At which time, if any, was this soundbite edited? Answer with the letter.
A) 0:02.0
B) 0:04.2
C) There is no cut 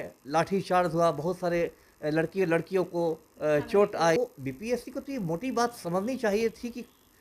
B